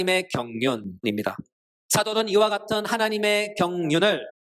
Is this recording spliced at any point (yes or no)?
yes